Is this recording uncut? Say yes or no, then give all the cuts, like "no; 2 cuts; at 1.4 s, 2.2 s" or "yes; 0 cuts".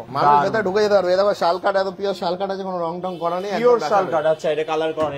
yes; 0 cuts